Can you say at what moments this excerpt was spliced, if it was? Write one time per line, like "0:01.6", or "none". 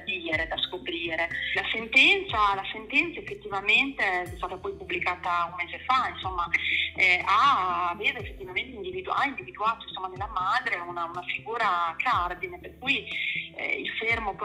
0:01.5